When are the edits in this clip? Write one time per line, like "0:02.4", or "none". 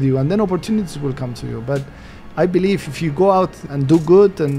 0:03.7

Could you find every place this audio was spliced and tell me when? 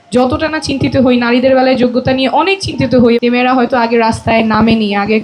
0:03.2

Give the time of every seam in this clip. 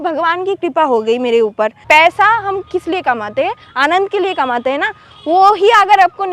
0:01.8

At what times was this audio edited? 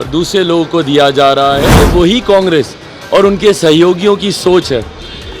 0:01.8

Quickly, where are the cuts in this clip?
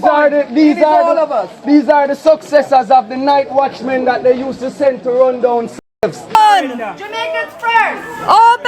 0:06.3

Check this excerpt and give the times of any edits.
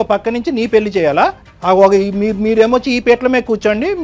0:01.5

